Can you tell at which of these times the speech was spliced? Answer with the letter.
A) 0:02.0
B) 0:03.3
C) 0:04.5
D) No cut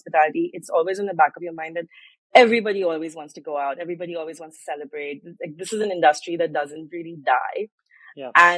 D